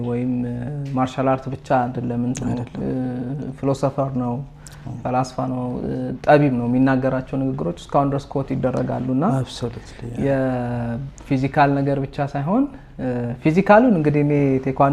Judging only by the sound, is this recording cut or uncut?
uncut